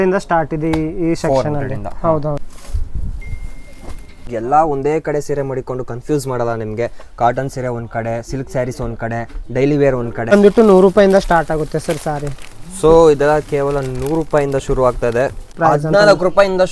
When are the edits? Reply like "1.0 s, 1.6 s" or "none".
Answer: 2.5 s, 4.3 s, 10.3 s, 15.5 s